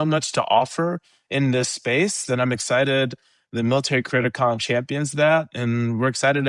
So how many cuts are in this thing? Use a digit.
0